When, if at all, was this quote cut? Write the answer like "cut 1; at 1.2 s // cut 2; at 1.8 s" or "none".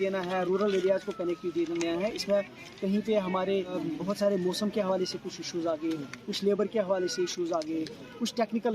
cut 1; at 3.7 s